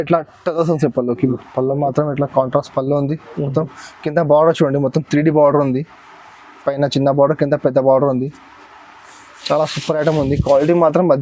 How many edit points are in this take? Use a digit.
1